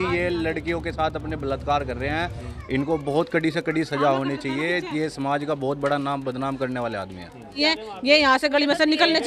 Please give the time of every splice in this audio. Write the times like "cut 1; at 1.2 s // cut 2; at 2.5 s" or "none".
cut 1; at 7.6 s